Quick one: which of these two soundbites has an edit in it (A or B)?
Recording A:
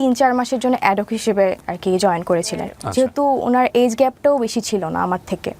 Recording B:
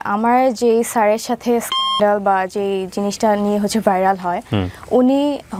A